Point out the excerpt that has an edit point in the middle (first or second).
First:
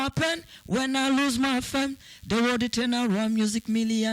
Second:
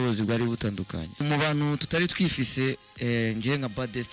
second